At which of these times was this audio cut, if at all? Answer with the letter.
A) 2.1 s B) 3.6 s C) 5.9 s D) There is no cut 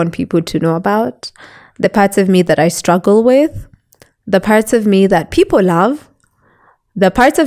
D